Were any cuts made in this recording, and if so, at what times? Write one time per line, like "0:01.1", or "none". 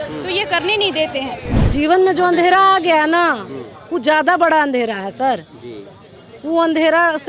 0:01.5